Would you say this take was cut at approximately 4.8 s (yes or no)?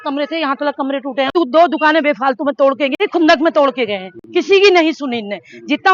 no